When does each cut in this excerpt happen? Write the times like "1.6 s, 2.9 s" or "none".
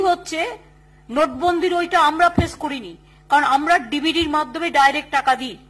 none